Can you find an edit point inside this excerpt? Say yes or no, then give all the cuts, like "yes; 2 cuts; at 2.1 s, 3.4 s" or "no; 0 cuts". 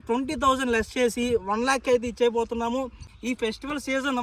yes; 1 cut; at 3.1 s